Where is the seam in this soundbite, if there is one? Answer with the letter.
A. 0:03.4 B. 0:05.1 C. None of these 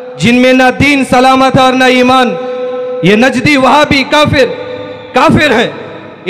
C